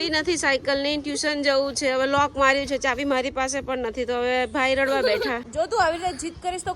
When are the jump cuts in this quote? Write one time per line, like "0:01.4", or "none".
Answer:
0:05.5